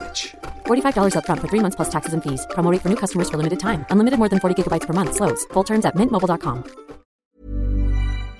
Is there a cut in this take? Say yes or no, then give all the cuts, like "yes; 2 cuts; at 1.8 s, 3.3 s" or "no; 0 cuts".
yes; 1 cut; at 7.1 s